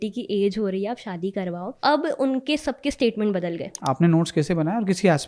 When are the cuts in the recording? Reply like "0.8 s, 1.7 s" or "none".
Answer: 1.8 s, 3.8 s

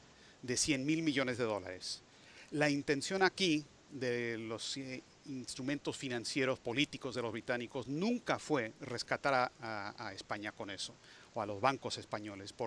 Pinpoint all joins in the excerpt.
none

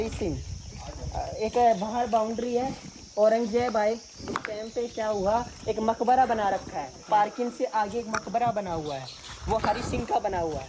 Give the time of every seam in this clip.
none

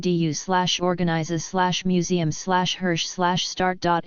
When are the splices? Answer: none

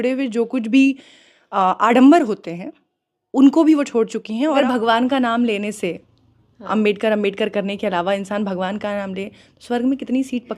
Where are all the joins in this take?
4.6 s

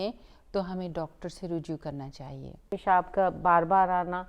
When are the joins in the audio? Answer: 2.7 s

